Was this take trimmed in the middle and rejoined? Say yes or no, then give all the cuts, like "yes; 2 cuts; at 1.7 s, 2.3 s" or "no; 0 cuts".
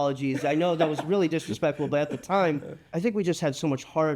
yes; 1 cut; at 2.8 s